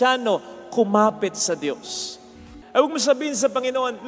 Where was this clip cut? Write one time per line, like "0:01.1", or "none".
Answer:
0:02.2

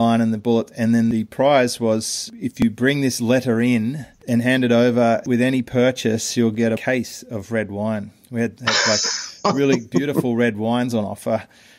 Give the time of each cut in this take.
0:02.6

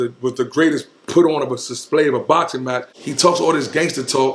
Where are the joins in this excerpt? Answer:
0:03.0

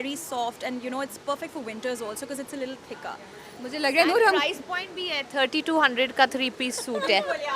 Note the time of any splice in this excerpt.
none

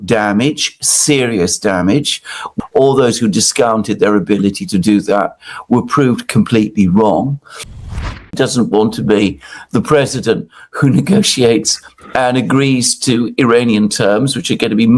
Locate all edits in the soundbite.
0:02.4
0:07.9

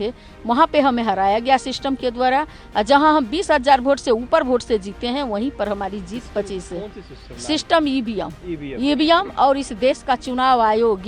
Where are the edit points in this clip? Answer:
none

